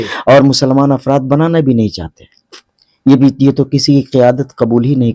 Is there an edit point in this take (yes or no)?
no